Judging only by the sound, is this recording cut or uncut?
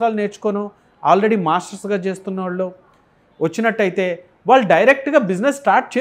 uncut